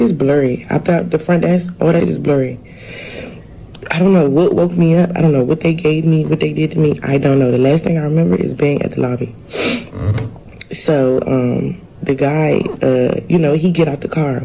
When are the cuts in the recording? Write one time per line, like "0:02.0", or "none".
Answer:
0:02.0